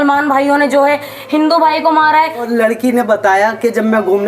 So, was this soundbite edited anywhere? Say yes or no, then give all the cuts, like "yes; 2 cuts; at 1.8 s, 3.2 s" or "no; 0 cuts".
yes; 1 cut; at 2.5 s